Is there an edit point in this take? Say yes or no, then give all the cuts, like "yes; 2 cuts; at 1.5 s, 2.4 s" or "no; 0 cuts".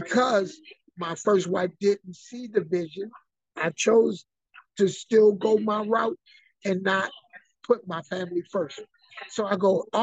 no; 0 cuts